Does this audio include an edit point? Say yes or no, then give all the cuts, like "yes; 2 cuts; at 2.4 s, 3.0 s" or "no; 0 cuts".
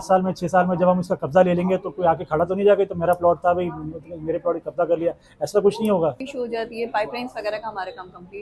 yes; 1 cut; at 6.3 s